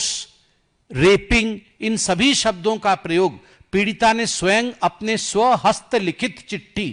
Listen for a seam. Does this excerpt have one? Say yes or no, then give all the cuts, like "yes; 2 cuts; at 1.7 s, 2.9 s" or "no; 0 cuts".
no; 0 cuts